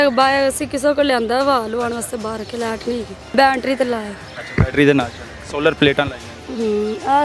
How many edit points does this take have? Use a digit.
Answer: 1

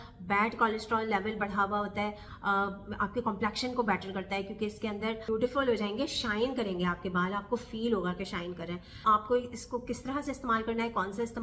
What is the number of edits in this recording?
3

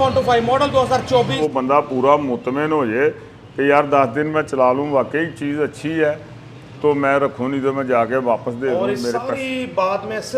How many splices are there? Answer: 1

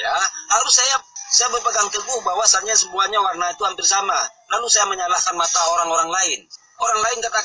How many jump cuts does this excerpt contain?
1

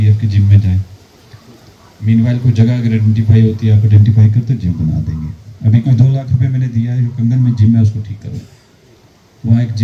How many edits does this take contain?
0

